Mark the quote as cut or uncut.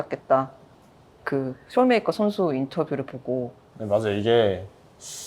cut